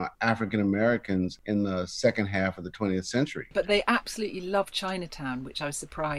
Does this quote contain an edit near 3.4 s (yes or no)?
yes